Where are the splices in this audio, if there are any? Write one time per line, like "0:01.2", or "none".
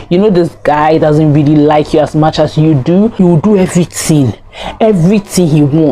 0:03.2